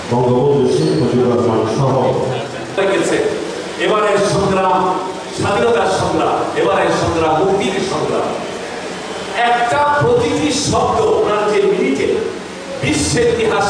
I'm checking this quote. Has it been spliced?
yes; 1 cut; at 2.8 s

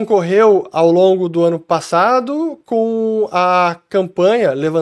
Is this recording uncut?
yes; 0 cuts

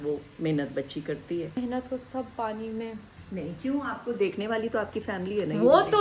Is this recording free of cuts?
no; 2 cuts; at 1.6 s, 3.1 s

